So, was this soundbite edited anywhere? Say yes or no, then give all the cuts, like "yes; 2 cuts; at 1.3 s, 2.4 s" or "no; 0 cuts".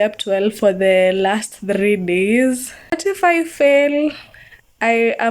yes; 1 cut; at 3.0 s